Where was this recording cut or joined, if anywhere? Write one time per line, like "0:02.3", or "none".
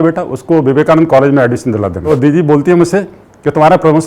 0:02.0